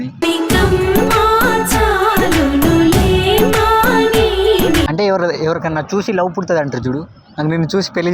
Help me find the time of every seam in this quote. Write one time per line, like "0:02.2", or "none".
0:04.9